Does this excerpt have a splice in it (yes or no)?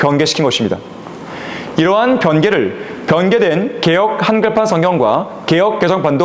no